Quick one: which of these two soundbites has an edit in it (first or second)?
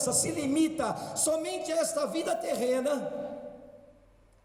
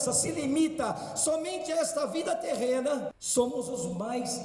second